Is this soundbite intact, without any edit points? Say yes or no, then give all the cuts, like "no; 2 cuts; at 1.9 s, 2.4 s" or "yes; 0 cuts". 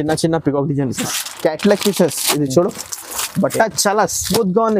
no; 1 cut; at 1.0 s